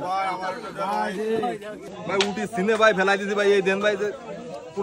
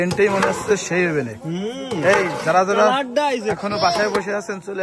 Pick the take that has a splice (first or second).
first